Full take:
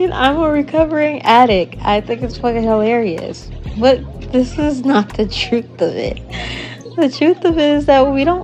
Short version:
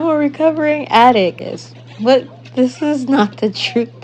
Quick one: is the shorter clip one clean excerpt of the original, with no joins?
no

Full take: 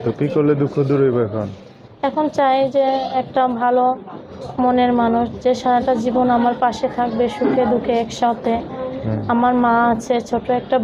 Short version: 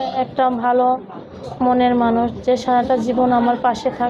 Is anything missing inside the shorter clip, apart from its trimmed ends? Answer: no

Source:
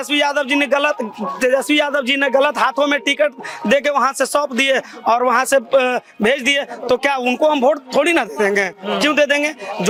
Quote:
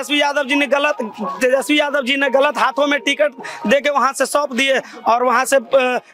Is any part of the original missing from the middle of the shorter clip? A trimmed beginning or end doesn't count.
no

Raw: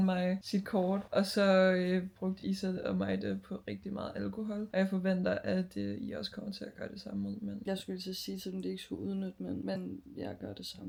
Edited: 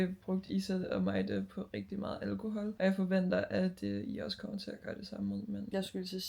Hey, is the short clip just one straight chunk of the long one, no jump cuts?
yes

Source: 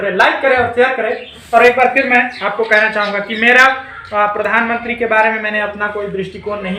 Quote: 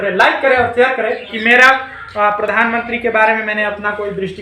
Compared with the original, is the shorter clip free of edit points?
no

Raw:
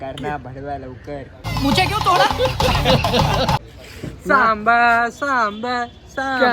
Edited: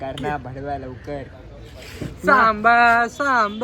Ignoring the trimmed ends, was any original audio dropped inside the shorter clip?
yes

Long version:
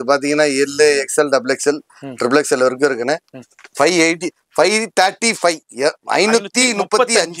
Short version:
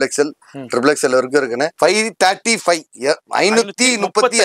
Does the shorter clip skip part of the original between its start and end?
yes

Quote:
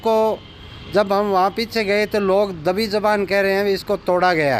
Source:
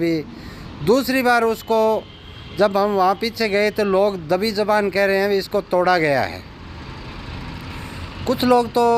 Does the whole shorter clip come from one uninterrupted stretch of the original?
yes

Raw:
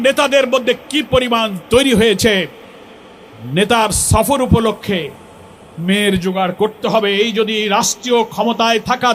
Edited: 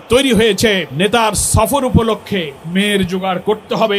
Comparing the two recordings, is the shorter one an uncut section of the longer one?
no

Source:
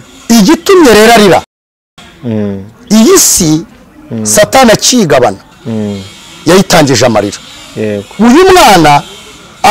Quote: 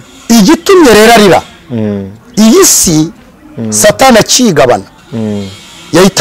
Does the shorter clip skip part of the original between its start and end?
yes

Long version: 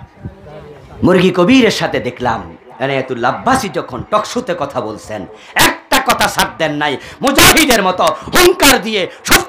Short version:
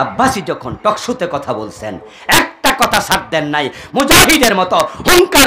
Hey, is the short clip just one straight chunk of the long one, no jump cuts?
yes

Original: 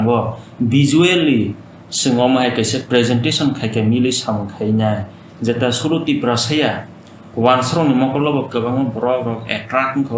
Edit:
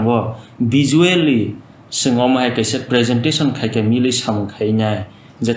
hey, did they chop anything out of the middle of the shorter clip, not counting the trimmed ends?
no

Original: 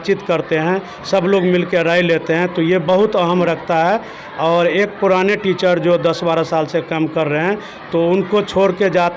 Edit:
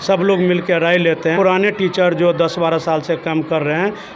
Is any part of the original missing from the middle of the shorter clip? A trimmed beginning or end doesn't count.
yes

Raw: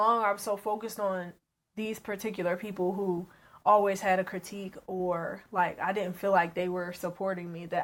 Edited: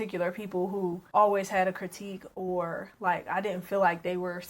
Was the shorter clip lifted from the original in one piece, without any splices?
no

